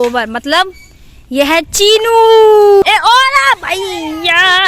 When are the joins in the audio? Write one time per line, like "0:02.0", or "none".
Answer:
0:02.8